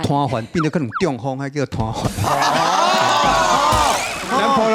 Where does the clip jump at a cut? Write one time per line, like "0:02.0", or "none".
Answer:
none